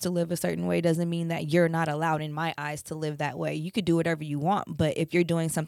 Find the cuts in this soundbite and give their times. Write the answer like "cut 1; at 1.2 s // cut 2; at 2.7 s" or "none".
none